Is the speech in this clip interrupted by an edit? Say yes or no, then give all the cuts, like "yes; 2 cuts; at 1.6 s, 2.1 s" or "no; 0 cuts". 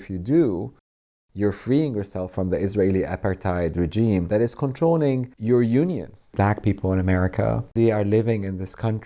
yes; 3 cuts; at 4.3 s, 5.3 s, 6.3 s